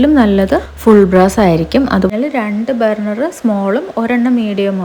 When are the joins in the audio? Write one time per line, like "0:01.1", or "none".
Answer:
0:02.1